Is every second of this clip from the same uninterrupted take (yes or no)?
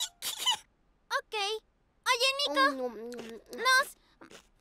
yes